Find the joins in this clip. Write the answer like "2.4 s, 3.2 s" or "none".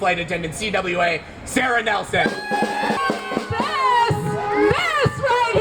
3.0 s